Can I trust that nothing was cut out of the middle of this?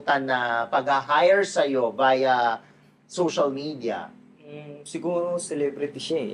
yes; 0 cuts

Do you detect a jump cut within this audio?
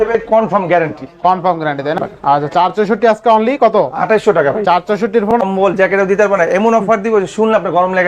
yes; 2 cuts; at 2.0 s, 5.4 s

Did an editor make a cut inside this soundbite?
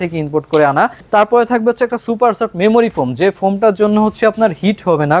yes; 1 cut; at 1.0 s

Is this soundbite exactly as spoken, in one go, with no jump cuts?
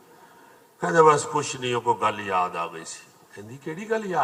yes; 0 cuts

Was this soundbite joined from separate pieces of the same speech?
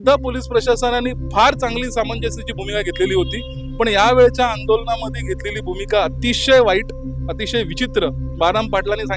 no; 0 cuts

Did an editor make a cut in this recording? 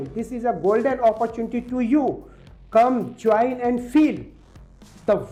no; 0 cuts

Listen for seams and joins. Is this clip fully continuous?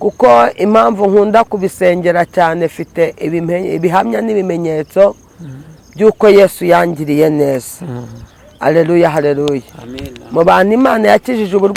yes; 0 cuts

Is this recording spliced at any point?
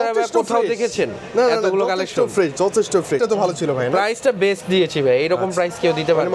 yes; 1 cut; at 3.2 s

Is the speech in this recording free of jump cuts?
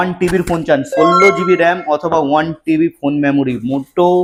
yes; 0 cuts

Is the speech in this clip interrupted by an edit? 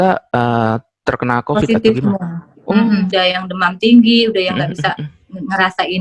yes; 1 cut; at 3.1 s

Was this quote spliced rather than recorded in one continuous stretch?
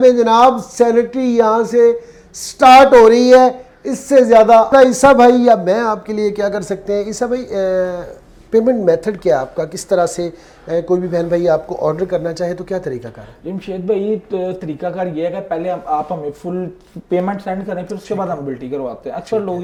no; 0 cuts

